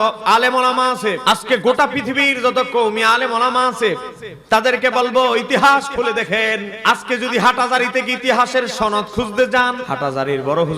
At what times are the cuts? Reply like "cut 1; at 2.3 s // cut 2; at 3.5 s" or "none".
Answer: cut 1; at 1.2 s // cut 2; at 6.7 s // cut 3; at 9.9 s